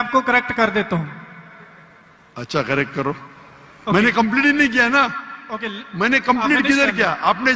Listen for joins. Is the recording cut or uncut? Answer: uncut